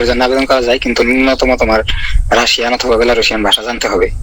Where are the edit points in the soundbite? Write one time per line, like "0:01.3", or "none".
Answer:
none